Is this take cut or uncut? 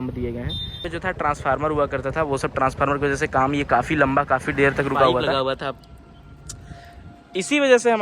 cut